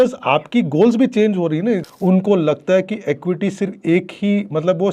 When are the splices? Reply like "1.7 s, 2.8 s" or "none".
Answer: 1.9 s

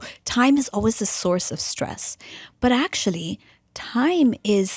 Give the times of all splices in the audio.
none

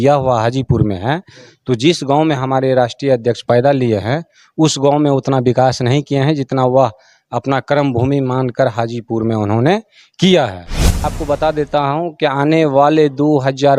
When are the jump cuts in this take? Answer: 11.1 s

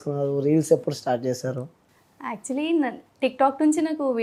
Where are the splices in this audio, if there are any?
none

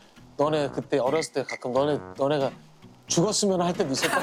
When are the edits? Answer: none

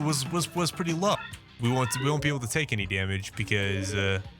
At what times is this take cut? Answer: 1.2 s

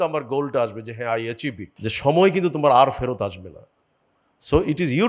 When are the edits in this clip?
1.7 s

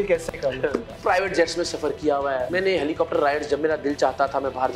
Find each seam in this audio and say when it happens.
0.9 s, 2.5 s

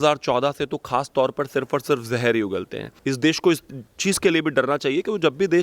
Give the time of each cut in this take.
2.9 s

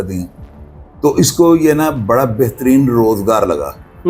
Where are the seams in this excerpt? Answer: none

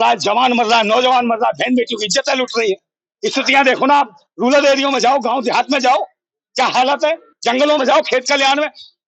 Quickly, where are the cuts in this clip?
none

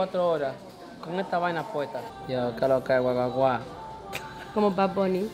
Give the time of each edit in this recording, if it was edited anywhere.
2.2 s

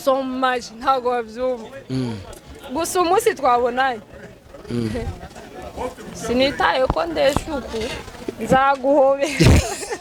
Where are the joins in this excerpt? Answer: none

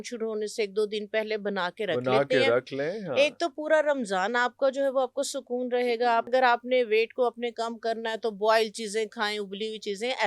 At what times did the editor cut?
6.3 s

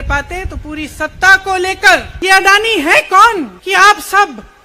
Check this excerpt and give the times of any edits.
2.1 s, 3.6 s

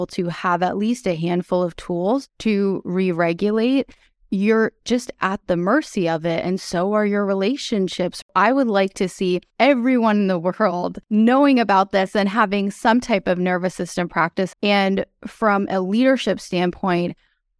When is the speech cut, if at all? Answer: 8.3 s, 9.5 s, 11.1 s, 14.5 s

